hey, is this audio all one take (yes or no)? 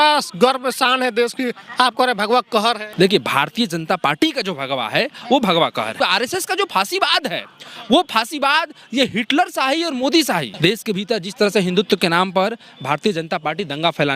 no